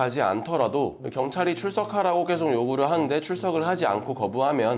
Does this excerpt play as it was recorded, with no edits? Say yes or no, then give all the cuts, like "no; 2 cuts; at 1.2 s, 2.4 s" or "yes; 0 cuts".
yes; 0 cuts